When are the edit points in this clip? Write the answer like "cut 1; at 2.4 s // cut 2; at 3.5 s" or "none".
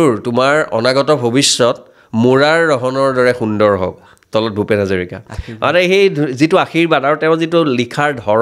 none